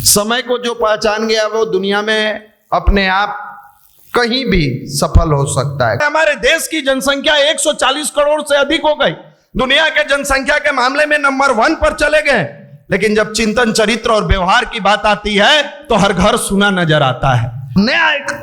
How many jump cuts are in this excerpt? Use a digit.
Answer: 2